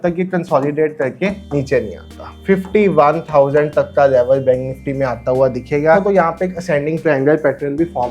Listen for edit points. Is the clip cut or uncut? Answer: cut